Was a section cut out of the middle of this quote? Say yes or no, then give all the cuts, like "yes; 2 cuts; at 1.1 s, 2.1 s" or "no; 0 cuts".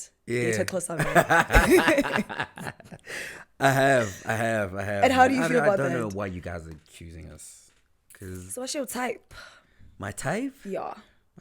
yes; 1 cut; at 8.5 s